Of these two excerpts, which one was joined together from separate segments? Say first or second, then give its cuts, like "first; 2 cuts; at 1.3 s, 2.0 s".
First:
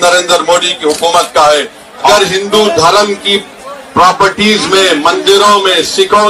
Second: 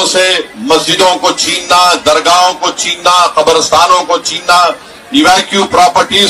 first; 1 cut; at 2.1 s